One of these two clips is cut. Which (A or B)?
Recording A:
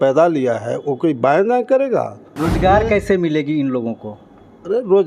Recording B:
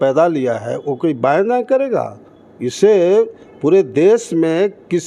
A